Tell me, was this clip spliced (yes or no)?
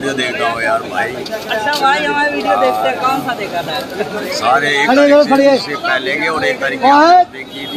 no